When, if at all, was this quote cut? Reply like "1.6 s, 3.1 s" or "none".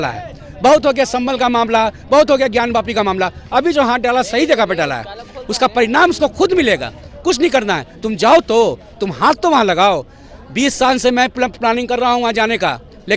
none